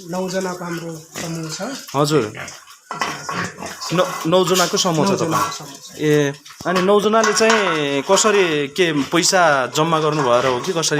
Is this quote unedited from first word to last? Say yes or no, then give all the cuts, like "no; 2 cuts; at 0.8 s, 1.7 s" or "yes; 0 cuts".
yes; 0 cuts